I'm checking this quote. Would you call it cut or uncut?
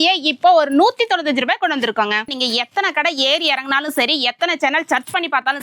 cut